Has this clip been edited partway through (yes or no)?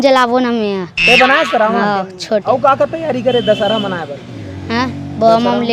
yes